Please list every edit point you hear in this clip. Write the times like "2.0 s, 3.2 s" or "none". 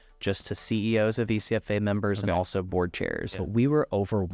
3.2 s